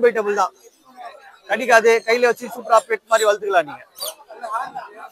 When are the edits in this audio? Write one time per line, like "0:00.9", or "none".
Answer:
none